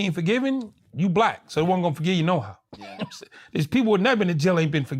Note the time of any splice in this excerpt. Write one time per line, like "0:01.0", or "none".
none